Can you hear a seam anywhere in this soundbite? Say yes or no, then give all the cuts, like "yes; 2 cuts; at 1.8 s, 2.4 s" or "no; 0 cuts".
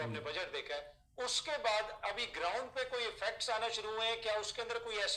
no; 0 cuts